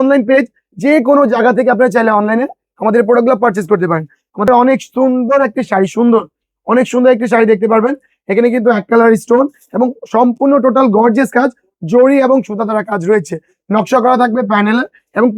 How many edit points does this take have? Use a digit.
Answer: 1